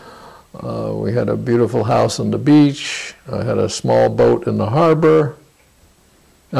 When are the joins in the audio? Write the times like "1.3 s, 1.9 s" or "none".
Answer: none